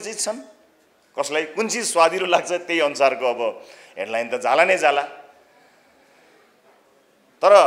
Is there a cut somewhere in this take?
no; 0 cuts

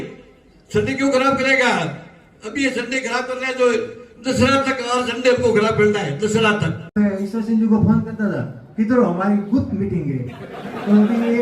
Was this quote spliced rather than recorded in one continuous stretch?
yes; 1 cut; at 6.9 s

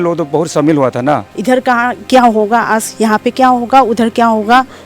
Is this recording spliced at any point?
yes; 1 cut; at 1.3 s

